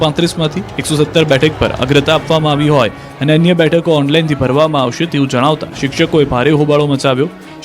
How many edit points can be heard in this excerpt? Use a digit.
0